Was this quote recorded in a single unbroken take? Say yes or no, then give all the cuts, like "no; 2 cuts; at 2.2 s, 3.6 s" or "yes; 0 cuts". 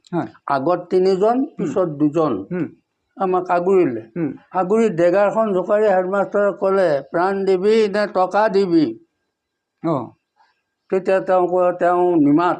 yes; 0 cuts